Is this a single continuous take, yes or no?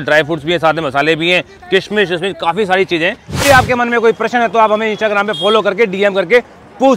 no